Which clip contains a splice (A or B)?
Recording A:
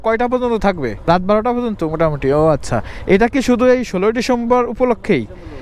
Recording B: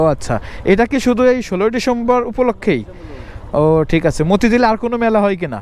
A